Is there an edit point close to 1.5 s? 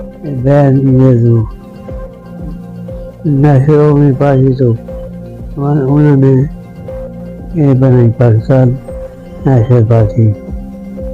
yes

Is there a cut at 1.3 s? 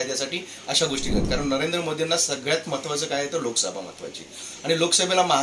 yes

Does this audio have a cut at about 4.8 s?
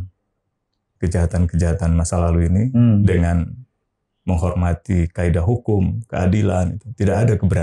no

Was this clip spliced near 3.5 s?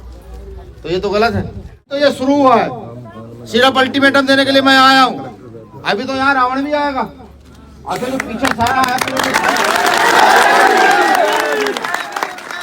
no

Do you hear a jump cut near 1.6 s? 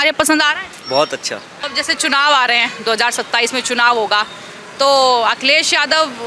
yes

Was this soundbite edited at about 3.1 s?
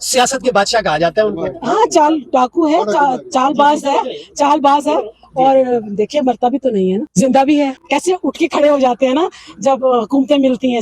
no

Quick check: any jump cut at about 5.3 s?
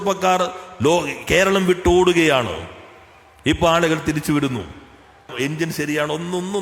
yes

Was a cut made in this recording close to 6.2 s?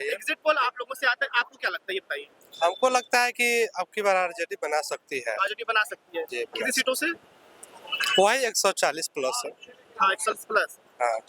no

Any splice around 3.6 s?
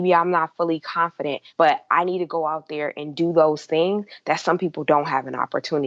no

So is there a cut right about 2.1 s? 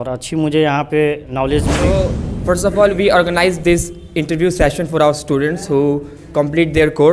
yes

